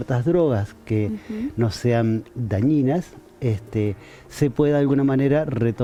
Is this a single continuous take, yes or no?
yes